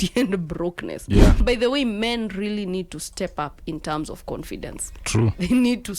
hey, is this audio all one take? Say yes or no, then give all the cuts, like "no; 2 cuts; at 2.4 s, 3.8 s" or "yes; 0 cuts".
no; 1 cut; at 1.4 s